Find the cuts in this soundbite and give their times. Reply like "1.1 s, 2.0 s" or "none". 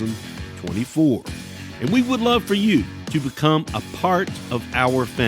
3.0 s, 4.4 s